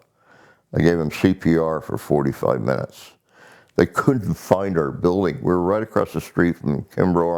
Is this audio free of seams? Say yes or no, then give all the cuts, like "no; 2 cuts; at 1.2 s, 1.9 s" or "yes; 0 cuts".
yes; 0 cuts